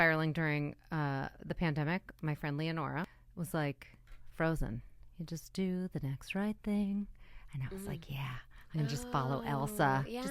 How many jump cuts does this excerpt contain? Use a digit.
1